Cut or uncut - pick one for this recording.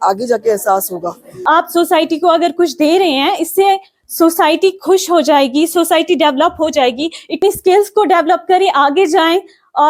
cut